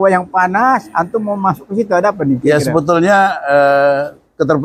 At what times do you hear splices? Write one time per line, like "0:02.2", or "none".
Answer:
none